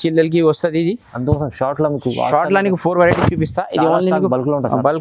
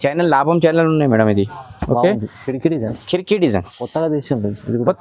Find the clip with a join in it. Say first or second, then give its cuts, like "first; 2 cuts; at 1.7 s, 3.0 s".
second; 1 cut; at 2.3 s